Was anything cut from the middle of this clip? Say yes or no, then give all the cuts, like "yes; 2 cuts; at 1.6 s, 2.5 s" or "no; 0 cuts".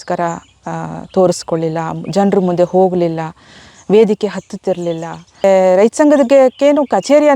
yes; 1 cut; at 5.4 s